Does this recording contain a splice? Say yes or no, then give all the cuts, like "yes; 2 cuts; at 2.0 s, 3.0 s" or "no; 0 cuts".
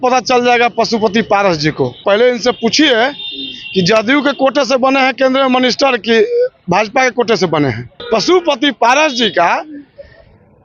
yes; 2 cuts; at 2.0 s, 8.0 s